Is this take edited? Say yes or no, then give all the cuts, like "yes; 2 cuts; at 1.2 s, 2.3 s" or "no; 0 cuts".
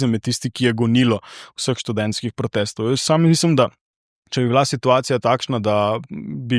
no; 0 cuts